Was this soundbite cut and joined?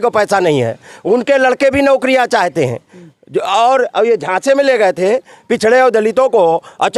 no; 0 cuts

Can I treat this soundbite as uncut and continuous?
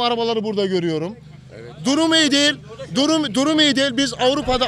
yes; 0 cuts

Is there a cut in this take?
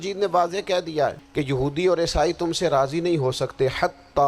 yes; 1 cut; at 1.2 s

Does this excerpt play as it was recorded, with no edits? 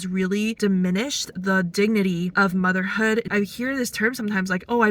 no; 1 cut; at 3.2 s

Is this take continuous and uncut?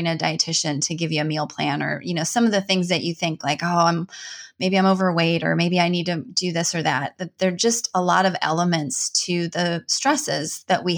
yes; 0 cuts

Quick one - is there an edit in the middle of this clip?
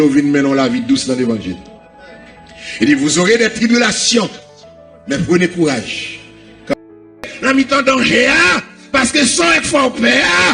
no; 0 cuts

